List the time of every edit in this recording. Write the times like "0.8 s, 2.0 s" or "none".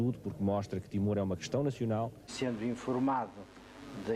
2.3 s